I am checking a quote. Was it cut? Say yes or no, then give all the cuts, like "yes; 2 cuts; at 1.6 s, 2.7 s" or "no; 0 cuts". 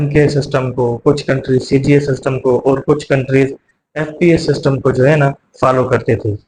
no; 0 cuts